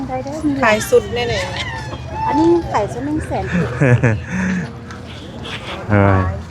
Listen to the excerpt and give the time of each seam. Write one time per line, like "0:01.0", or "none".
none